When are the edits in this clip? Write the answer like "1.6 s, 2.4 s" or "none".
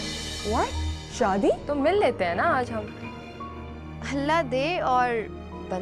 1.6 s